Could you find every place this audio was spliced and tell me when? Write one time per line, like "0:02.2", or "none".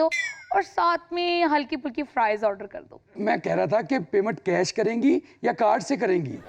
0:03.2